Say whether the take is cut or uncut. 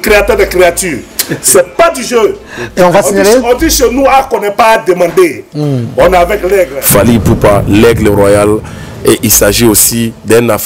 cut